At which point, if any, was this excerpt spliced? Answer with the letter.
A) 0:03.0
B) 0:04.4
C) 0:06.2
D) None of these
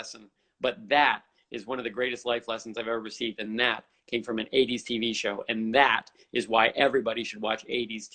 D